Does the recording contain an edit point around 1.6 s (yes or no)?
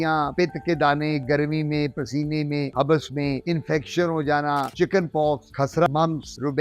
no